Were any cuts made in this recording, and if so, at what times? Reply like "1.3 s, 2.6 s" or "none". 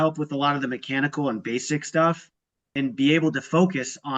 2.7 s